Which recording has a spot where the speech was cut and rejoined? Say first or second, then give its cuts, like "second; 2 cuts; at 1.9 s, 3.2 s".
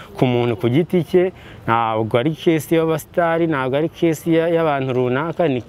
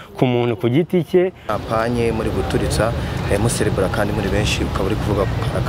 second; 1 cut; at 1.5 s